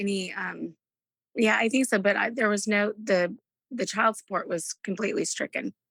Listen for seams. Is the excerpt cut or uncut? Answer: uncut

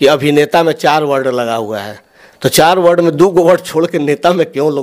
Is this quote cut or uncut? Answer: uncut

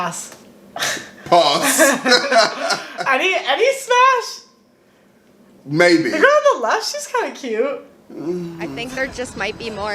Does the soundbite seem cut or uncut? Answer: cut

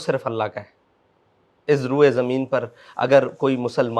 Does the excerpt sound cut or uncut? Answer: uncut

